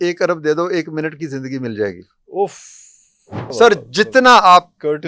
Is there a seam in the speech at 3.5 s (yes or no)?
yes